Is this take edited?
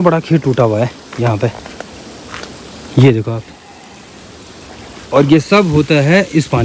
no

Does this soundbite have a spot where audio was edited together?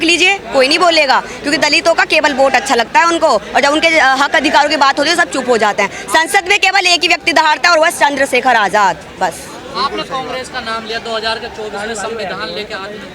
no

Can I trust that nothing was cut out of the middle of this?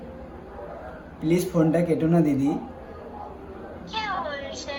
yes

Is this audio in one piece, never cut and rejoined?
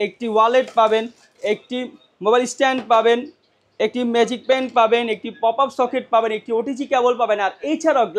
yes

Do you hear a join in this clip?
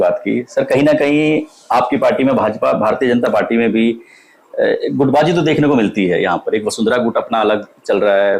no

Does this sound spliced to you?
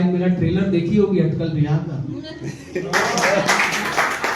no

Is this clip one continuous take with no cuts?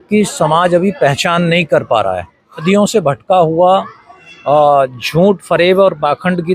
no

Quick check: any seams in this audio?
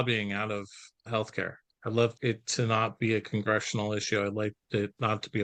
no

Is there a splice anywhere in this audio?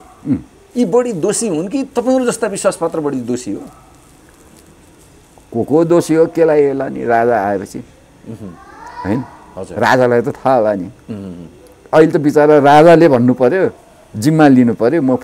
no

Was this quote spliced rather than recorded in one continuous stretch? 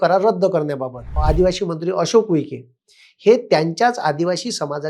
yes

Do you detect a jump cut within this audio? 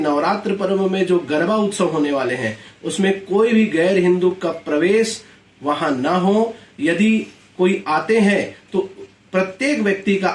no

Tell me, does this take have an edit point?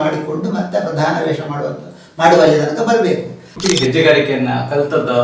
yes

